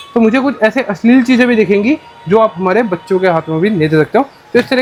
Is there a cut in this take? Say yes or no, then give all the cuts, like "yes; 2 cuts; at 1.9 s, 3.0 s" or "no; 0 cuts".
no; 0 cuts